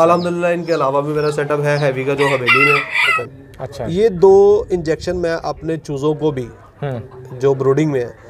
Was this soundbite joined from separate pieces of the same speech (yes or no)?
yes